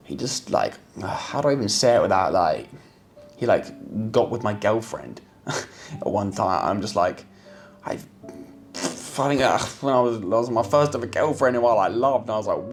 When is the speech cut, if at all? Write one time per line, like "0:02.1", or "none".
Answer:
none

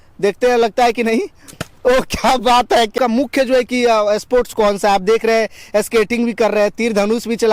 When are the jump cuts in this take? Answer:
0:02.9

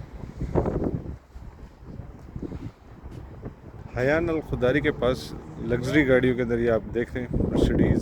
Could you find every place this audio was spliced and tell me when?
0:03.8

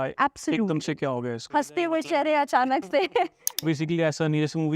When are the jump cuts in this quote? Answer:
0:01.4
0:03.5

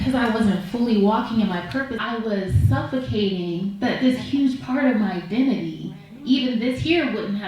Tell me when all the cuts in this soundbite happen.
0:02.0

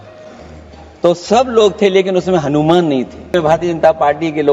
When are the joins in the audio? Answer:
0:03.3

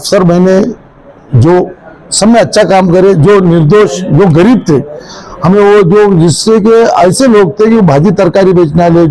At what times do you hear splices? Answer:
none

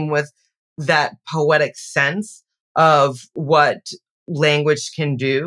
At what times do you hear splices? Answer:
none

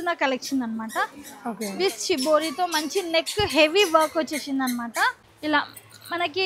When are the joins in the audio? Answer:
0:05.3

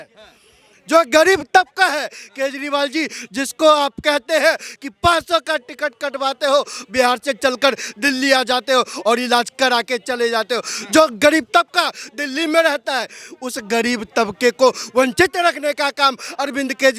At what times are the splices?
none

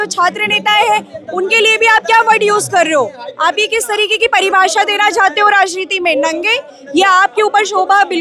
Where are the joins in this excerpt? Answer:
none

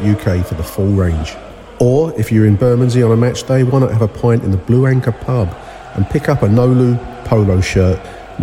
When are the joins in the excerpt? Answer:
none

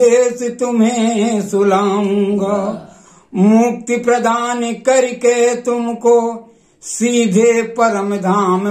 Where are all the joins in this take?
none

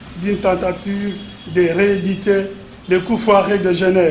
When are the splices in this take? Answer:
none

